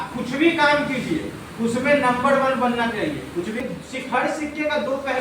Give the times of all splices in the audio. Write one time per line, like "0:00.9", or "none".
0:03.6